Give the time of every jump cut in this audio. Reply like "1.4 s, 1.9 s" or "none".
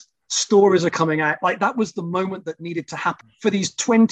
3.2 s